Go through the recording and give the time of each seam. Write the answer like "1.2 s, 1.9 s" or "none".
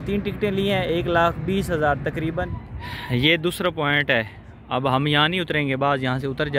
2.5 s